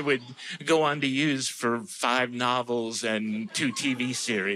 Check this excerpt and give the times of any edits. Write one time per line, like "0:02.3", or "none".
none